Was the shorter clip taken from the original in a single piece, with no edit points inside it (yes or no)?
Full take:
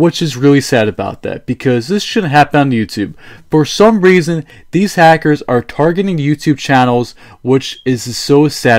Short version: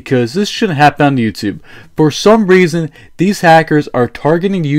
yes